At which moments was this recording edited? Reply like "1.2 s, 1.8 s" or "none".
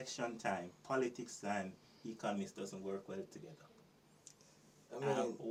none